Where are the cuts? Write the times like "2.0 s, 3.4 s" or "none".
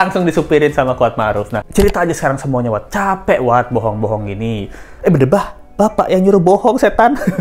1.5 s